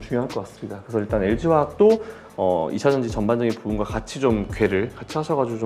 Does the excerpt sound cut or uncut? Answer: uncut